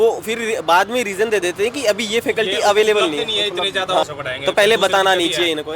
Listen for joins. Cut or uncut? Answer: cut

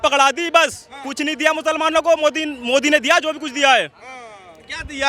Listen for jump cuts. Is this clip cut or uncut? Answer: uncut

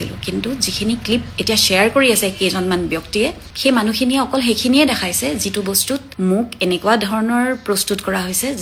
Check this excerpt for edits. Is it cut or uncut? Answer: uncut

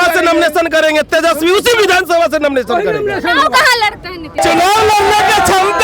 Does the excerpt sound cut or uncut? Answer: cut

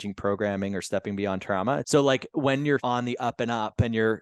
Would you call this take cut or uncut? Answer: cut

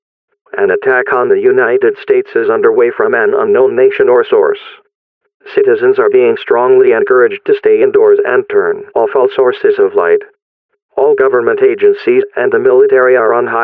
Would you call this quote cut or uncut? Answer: uncut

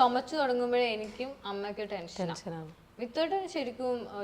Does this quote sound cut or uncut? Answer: uncut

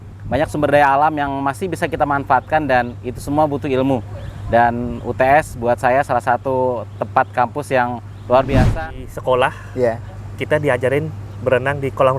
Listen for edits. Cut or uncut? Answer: cut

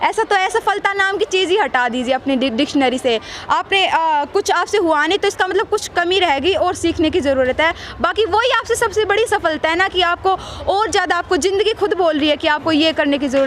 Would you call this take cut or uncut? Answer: uncut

